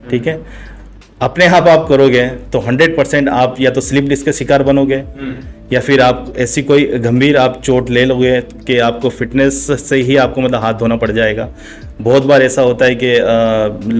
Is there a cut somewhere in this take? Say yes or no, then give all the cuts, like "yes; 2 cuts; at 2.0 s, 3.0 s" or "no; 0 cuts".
no; 0 cuts